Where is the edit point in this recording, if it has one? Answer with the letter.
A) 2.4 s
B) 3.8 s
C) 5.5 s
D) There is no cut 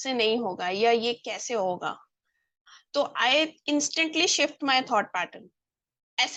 D